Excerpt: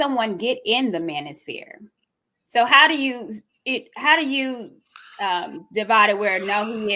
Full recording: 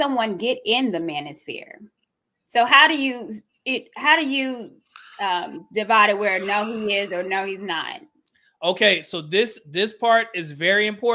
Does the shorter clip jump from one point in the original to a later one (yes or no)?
no